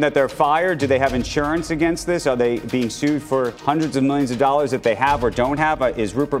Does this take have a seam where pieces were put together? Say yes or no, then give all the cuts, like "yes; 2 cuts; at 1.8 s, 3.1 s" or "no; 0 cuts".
yes; 1 cut; at 3.6 s